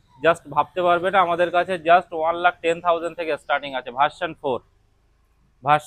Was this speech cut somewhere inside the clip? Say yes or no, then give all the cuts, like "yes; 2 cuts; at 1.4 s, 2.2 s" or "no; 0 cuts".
no; 0 cuts